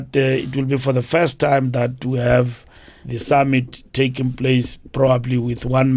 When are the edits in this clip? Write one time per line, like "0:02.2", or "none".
none